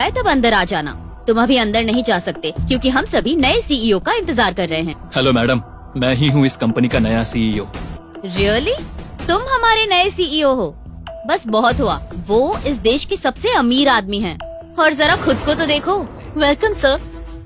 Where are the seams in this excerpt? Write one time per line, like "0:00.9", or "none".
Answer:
0:05.0
0:07.9
0:16.2